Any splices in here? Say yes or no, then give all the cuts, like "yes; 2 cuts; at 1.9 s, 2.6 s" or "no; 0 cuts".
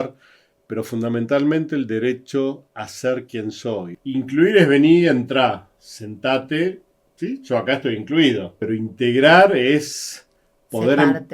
yes; 2 cuts; at 3.9 s, 8.5 s